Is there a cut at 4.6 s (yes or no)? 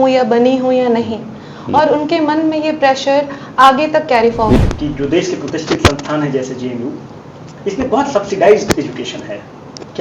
yes